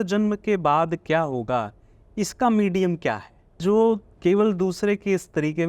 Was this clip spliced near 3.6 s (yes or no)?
yes